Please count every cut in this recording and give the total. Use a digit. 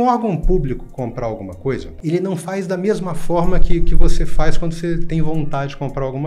1